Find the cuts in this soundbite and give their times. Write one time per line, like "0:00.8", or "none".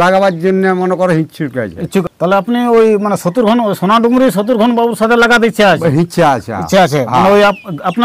0:02.0